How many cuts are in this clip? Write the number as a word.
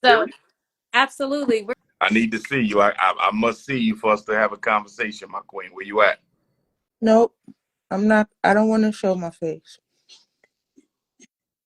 one